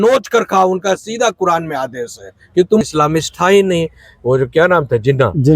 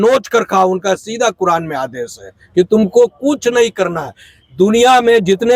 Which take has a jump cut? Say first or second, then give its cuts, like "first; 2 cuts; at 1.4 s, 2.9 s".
first; 1 cut; at 2.8 s